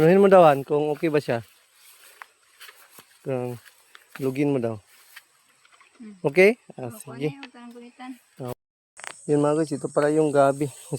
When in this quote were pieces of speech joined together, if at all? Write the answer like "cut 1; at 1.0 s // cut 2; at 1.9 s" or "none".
cut 1; at 8.5 s